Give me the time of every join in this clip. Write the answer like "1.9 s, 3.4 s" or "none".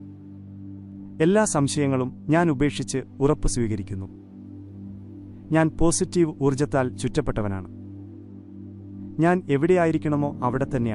7.7 s, 9.2 s